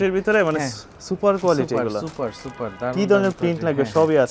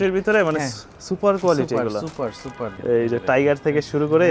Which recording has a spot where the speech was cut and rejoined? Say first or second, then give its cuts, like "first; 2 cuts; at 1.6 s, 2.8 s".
second; 1 cut; at 2.6 s